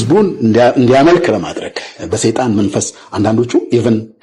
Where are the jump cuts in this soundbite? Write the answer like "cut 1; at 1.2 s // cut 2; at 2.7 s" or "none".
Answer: none